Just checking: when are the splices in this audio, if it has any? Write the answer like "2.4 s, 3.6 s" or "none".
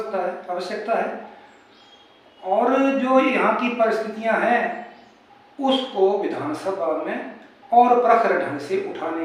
none